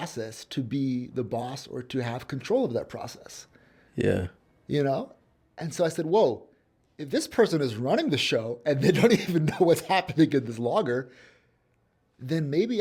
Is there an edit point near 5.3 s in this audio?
no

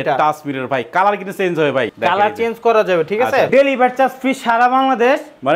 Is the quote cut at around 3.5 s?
yes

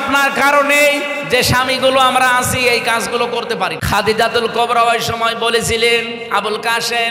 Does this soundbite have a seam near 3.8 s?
yes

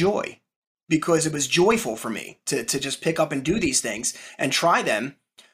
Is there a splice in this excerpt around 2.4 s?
no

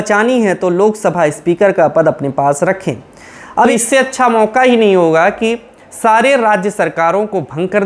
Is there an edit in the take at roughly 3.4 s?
yes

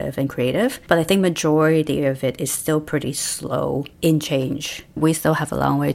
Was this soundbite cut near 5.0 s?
yes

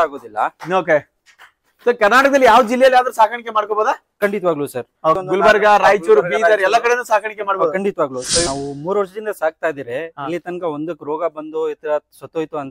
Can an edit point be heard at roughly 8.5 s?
yes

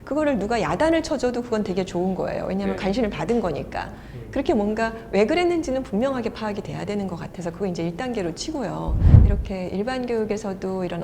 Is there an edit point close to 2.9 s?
no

